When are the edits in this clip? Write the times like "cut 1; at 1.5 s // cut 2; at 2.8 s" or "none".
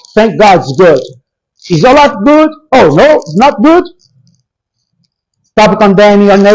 none